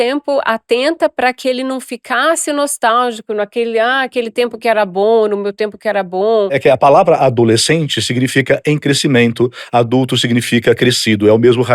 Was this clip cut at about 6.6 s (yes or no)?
yes